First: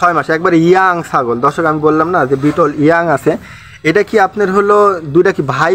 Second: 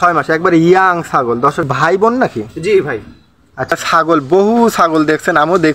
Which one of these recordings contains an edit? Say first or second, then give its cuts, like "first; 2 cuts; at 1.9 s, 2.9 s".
second; 2 cuts; at 1.6 s, 3.7 s